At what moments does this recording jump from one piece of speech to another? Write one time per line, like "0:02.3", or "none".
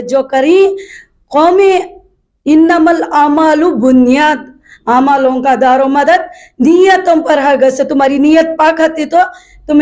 none